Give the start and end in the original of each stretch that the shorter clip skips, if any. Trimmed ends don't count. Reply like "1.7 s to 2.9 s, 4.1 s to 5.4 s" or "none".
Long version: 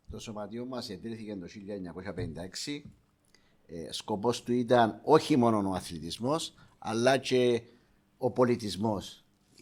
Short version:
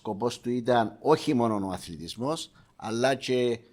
none